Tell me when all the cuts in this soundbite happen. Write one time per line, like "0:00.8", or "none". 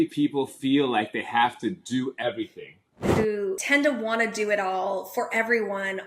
0:03.3